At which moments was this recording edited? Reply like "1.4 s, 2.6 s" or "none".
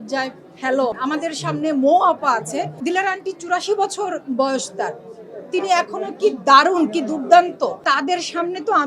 0.9 s, 2.8 s, 7.8 s